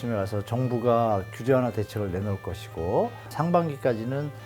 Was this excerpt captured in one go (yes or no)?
no